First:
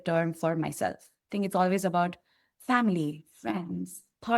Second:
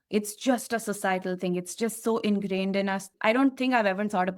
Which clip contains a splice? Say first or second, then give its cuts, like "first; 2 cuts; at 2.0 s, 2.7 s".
second; 1 cut; at 3.1 s